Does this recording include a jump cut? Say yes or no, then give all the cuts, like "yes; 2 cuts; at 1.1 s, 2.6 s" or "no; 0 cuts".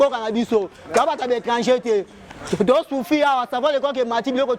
no; 0 cuts